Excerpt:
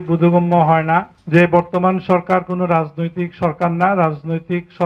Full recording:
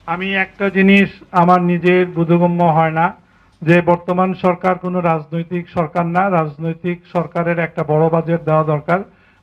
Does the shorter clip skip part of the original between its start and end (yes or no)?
yes